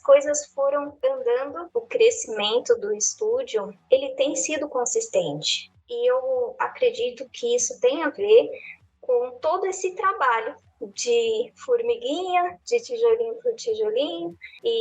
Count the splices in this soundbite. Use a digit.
1